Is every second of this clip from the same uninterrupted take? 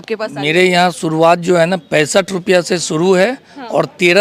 yes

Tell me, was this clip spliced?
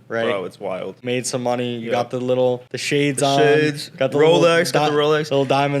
yes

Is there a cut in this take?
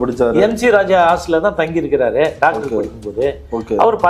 no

